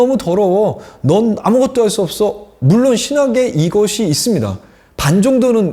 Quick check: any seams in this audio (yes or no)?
no